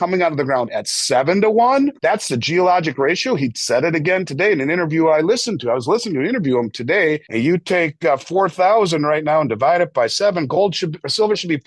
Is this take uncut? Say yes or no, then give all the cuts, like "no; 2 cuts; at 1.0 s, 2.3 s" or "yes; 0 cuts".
no; 2 cuts; at 2.0 s, 7.3 s